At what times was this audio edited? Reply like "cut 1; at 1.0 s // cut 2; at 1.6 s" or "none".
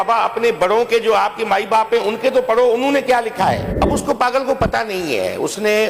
cut 1; at 3.7 s